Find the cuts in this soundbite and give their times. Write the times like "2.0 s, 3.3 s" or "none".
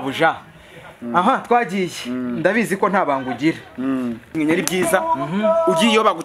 4.3 s